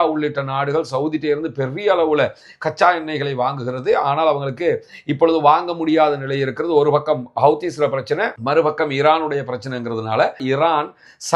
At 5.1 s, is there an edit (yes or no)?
no